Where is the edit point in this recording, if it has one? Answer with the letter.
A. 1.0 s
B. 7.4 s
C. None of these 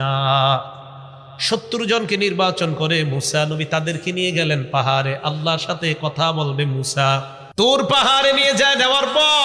B